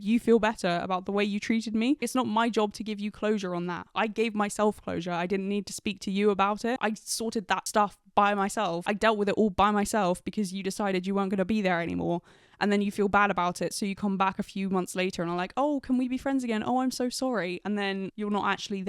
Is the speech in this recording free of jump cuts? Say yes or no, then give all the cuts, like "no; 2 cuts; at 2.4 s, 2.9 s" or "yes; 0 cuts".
no; 3 cuts; at 2.1 s, 7.2 s, 8.8 s